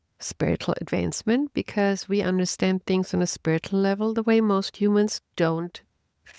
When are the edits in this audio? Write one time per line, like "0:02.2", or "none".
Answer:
none